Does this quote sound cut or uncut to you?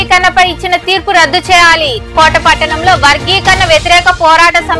uncut